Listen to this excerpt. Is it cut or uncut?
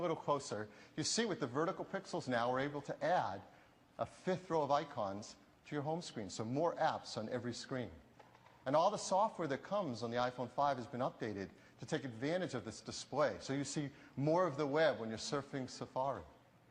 cut